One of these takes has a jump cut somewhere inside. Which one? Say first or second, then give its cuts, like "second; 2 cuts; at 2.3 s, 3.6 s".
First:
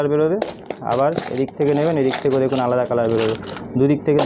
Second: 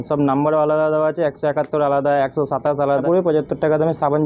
second; 1 cut; at 3.0 s